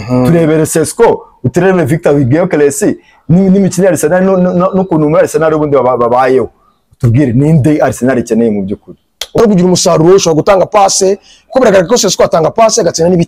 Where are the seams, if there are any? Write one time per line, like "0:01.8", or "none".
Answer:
0:09.4